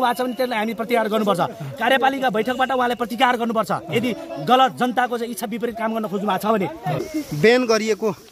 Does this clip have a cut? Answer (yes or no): yes